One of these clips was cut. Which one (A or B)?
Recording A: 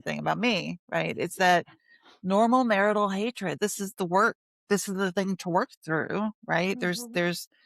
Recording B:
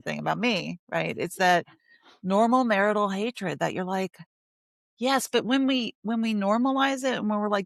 A